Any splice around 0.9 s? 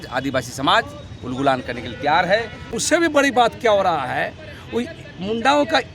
no; 1 cut; at 2.7 s

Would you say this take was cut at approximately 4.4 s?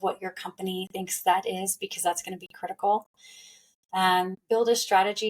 yes; 1 cut; at 4.4 s

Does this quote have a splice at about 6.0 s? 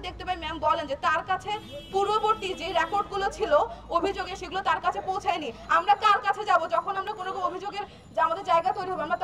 no; 0 cuts

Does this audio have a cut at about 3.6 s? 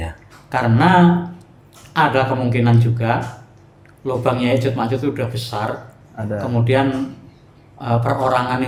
no; 0 cuts

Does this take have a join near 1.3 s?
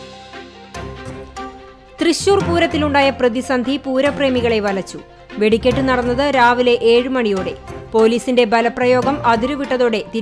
yes; 1 cut; at 1.3 s

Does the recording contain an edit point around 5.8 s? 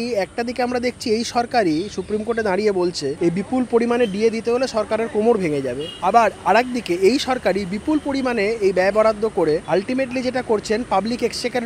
yes; 3 cuts; at 3.1 s, 5.8 s, 9.6 s

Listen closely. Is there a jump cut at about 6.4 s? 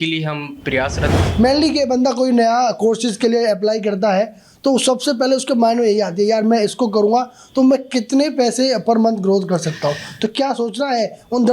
no; 1 cut; at 1.1 s

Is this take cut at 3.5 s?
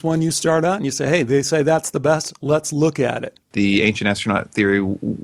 yes; 1 cut; at 3.5 s

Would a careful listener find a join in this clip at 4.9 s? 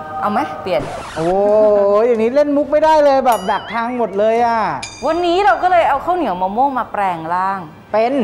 yes; 1 cut; at 4.9 s

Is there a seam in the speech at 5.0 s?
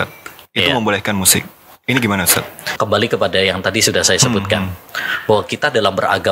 no; 1 cut; at 2.6 s

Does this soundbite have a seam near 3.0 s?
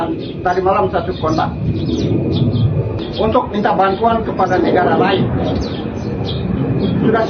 yes; 1 cut; at 3.0 s

